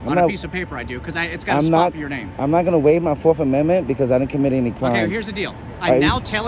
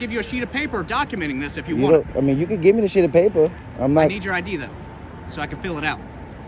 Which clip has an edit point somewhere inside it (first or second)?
first